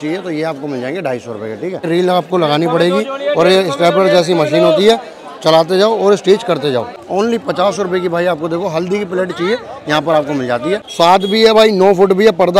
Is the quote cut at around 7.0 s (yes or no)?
yes